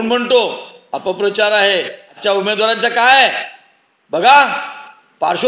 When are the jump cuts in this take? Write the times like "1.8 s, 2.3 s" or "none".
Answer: 2.0 s